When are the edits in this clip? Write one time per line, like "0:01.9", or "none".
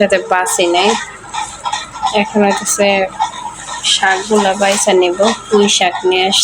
none